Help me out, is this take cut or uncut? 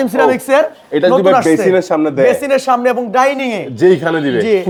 uncut